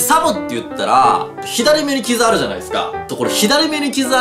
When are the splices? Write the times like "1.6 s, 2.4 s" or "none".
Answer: 1.4 s, 3.0 s

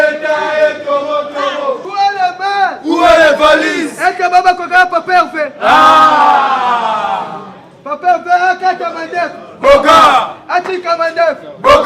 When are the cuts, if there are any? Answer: 1.8 s

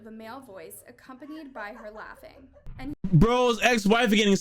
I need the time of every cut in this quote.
2.6 s

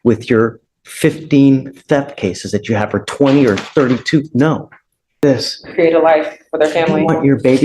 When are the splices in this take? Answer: 5.2 s

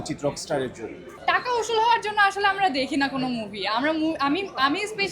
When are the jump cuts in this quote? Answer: 1.1 s

